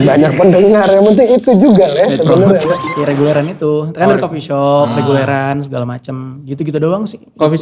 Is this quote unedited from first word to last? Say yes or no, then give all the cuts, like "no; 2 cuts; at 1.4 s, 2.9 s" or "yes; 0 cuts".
no; 1 cut; at 2.9 s